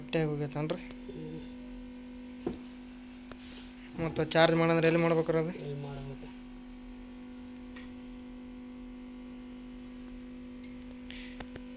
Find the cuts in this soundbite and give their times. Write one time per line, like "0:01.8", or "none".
none